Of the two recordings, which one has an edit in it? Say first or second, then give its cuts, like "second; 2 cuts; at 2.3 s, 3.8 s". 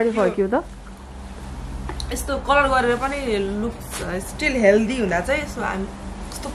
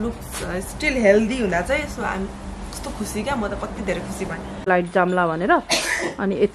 second; 1 cut; at 4.7 s